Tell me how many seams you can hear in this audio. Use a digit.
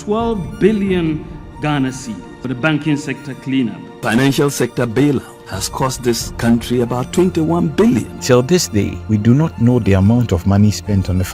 2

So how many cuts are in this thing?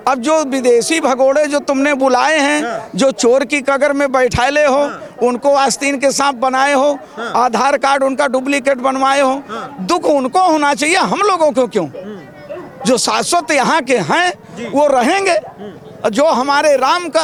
0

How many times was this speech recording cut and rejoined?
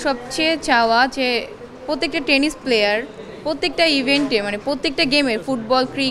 0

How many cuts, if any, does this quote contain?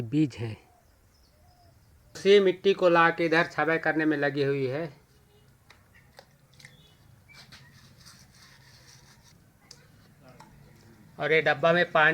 1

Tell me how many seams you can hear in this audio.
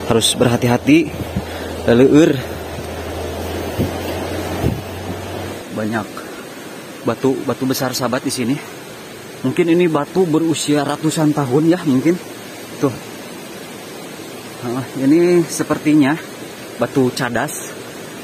1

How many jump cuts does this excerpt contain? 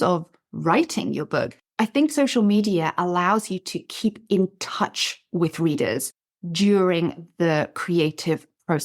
1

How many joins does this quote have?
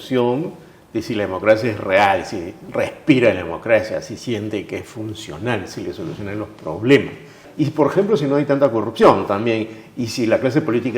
1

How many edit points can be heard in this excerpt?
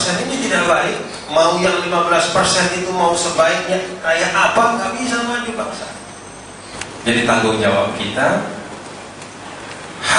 1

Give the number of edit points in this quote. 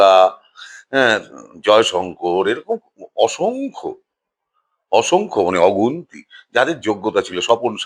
0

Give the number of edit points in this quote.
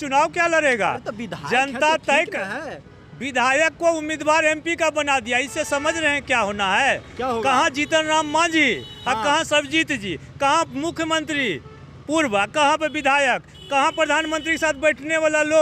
0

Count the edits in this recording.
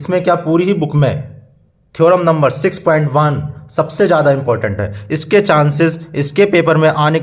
0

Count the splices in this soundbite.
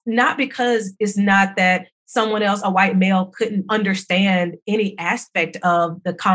1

